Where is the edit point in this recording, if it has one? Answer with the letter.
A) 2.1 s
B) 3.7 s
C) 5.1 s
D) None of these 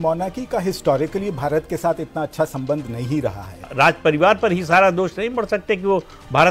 B